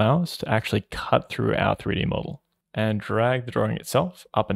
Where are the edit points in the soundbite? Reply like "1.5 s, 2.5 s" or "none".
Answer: 2.6 s